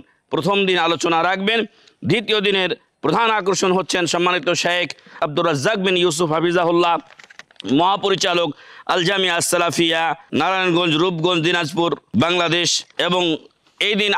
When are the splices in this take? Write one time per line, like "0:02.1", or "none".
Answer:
0:05.1
0:10.2
0:12.0
0:12.8